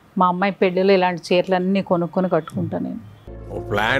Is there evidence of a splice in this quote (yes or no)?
no